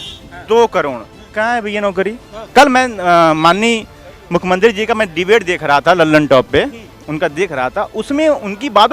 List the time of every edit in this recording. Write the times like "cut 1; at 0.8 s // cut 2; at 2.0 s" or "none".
cut 1; at 2.3 s